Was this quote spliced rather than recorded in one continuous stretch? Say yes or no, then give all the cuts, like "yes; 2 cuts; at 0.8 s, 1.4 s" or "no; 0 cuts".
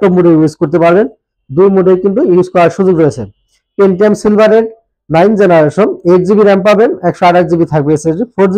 no; 0 cuts